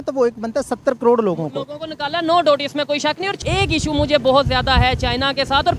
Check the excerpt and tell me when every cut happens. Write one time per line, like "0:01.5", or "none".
0:03.4